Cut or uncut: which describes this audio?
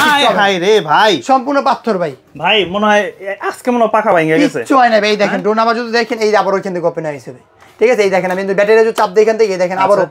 uncut